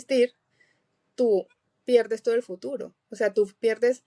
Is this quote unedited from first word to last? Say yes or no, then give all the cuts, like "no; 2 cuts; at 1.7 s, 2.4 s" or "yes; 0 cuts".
yes; 0 cuts